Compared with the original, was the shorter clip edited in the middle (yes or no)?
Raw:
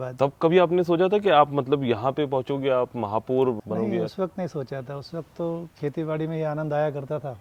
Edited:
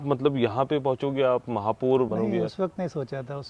yes